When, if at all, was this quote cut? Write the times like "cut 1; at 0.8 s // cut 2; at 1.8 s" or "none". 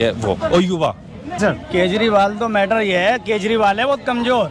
cut 1; at 1.4 s